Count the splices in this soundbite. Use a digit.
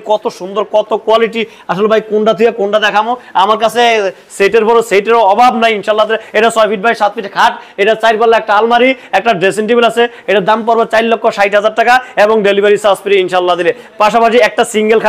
0